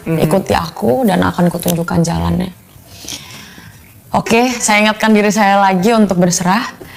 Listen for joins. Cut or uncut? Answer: uncut